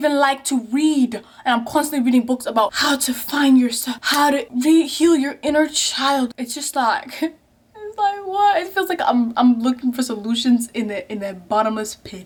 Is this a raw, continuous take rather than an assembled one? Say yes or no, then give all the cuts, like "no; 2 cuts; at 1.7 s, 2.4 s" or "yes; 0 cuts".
yes; 0 cuts